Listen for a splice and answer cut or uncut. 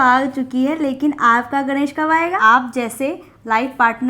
cut